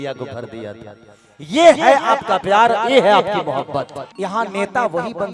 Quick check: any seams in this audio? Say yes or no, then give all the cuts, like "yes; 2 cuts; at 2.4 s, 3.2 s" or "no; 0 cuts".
yes; 1 cut; at 4.0 s